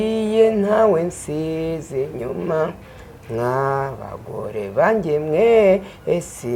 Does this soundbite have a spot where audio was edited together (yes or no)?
no